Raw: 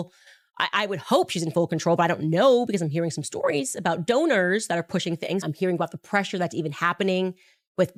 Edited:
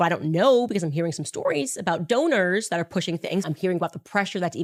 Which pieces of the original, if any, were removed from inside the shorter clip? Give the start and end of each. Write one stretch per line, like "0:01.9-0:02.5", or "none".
none